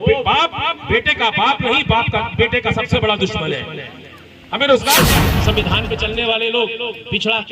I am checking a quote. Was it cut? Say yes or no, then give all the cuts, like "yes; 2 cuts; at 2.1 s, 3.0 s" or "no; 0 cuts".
yes; 1 cut; at 5.3 s